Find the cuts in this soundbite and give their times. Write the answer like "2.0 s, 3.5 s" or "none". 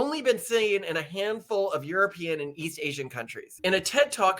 3.4 s